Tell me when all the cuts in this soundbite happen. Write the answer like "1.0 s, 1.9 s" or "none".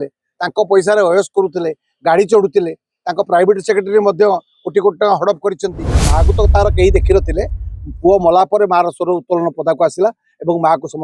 6.1 s